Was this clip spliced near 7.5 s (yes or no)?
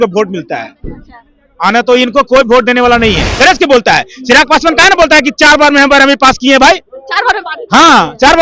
no